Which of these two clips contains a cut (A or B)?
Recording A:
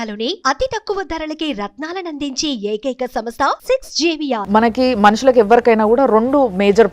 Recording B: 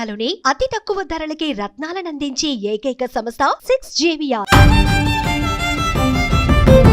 A